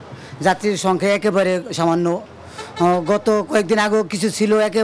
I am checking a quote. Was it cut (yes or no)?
no